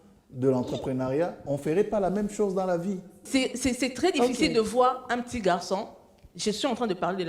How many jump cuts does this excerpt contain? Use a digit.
1